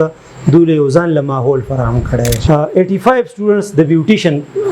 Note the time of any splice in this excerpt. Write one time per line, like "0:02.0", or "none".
0:02.4